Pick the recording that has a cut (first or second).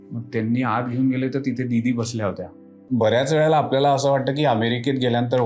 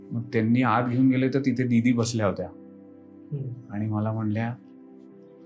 first